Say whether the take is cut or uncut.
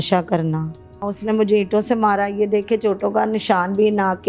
cut